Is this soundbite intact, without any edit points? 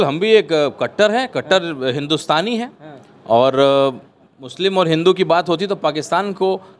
yes; 0 cuts

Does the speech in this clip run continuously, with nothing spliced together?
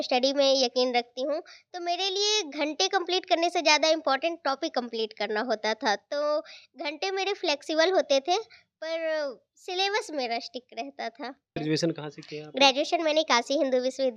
no; 1 cut; at 11.6 s

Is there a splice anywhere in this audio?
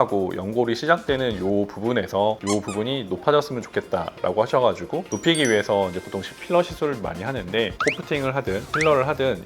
yes; 1 cut; at 7.7 s

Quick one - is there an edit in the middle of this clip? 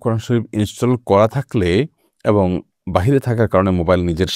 no; 0 cuts

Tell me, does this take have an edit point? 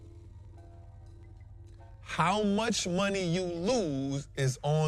yes; 1 cut; at 1.5 s

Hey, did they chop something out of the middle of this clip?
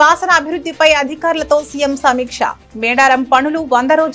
no; 0 cuts

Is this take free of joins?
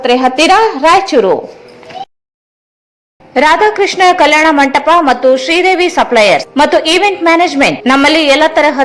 yes; 0 cuts

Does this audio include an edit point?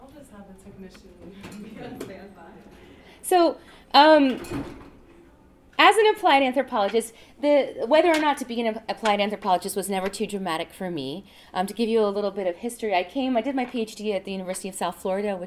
no; 0 cuts

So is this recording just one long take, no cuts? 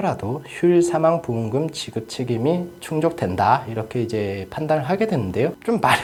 yes; 0 cuts

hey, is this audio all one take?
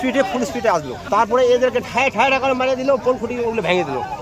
no; 1 cut; at 0.9 s

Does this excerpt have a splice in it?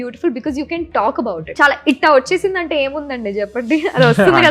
yes; 1 cut; at 1.5 s

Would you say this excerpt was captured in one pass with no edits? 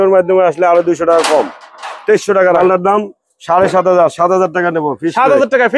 no; 1 cut; at 2.6 s

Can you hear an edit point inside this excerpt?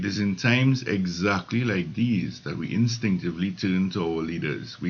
no; 0 cuts

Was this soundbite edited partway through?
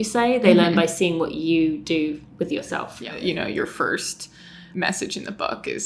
yes; 2 cuts; at 3.2 s, 4.7 s

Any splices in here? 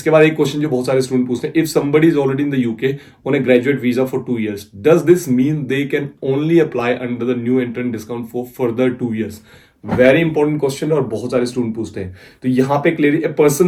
no; 0 cuts

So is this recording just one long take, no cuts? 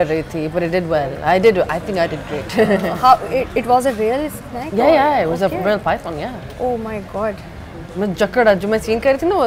yes; 0 cuts

